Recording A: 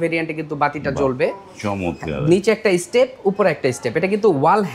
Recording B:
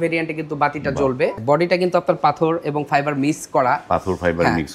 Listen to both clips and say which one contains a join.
B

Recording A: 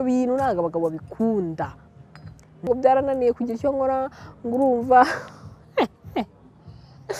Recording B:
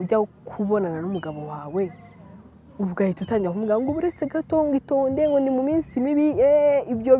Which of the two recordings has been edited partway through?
A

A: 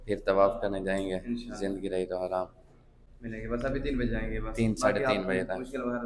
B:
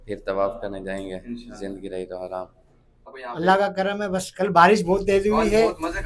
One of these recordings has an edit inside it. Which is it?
B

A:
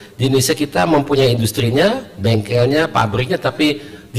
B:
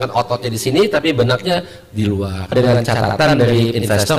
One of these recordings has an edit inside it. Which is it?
B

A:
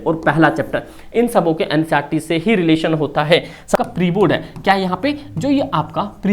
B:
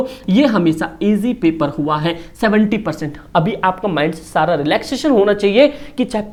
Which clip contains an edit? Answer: A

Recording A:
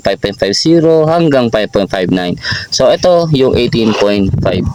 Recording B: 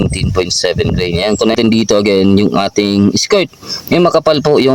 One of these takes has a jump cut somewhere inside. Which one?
B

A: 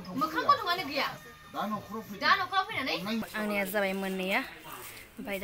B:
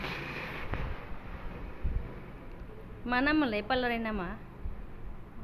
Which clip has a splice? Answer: A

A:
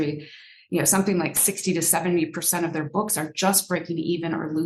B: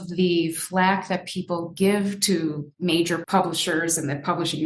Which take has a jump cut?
B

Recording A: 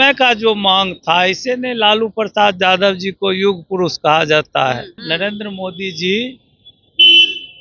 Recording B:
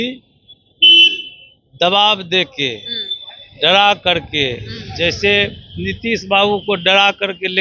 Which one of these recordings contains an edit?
A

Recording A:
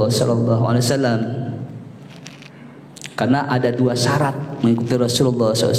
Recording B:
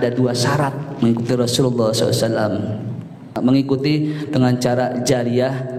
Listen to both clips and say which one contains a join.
B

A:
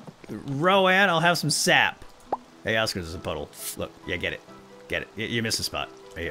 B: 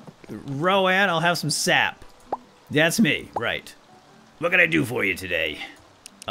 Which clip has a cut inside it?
A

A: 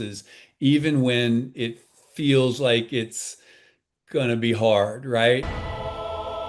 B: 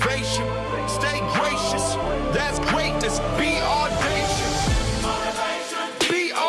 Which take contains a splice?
A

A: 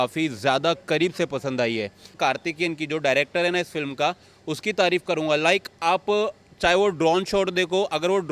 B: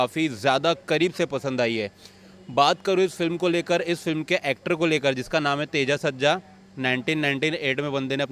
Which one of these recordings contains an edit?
A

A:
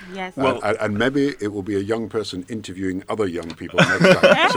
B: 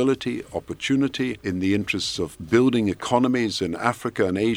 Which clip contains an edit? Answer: B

